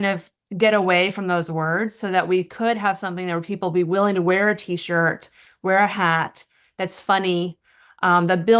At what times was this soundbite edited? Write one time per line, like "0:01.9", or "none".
none